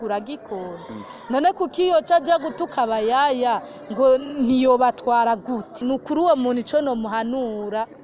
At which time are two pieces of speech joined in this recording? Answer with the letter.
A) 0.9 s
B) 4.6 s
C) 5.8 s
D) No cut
C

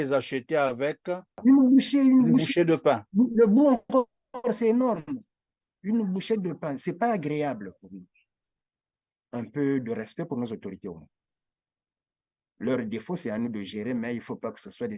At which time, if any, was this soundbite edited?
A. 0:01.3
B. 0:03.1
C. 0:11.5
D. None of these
A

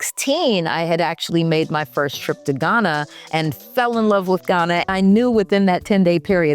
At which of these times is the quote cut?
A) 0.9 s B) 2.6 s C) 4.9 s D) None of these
C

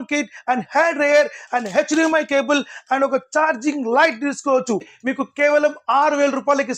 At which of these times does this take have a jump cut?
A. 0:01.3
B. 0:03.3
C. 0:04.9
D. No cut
C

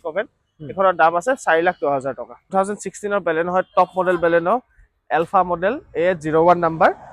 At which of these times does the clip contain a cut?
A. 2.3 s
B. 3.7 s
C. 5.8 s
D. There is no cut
A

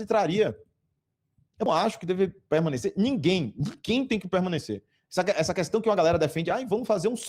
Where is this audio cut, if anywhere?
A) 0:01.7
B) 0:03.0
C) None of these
A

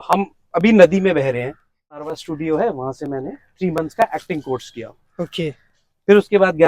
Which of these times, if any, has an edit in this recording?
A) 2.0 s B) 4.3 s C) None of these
A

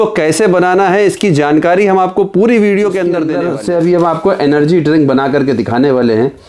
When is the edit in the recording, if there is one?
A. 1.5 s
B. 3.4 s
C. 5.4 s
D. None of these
B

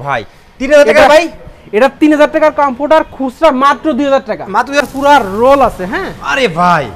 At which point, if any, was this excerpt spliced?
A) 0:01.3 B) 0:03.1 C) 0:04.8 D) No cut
C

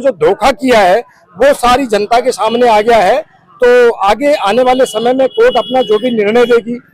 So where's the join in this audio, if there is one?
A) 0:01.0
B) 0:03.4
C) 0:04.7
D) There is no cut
D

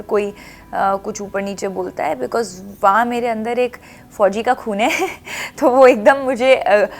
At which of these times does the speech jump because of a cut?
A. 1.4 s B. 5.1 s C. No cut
C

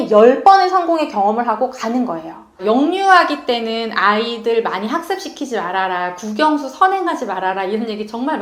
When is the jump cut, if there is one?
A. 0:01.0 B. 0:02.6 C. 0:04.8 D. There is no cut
B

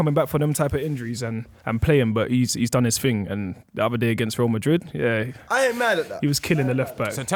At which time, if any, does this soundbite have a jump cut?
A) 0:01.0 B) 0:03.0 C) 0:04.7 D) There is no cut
D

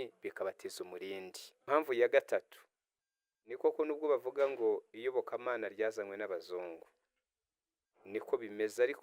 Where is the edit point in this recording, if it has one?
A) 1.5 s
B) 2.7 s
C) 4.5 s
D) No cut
A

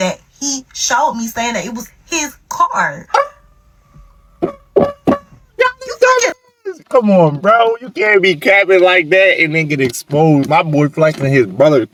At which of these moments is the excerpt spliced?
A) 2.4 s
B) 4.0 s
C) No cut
C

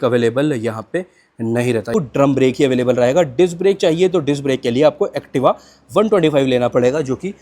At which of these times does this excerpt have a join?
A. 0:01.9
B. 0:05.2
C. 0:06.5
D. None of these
A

